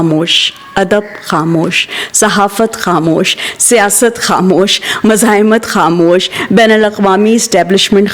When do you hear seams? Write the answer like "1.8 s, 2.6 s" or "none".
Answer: none